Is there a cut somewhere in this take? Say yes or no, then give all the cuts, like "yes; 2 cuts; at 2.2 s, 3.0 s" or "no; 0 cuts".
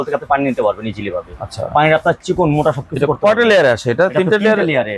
no; 0 cuts